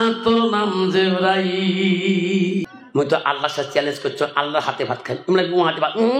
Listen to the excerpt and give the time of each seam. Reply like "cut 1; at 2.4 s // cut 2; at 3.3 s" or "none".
cut 1; at 2.7 s